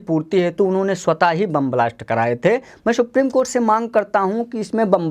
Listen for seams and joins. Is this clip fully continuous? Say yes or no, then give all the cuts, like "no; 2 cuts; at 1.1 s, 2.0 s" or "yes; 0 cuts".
yes; 0 cuts